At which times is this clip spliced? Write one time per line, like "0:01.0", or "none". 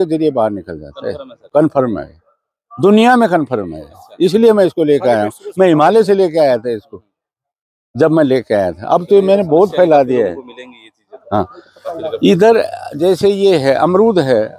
none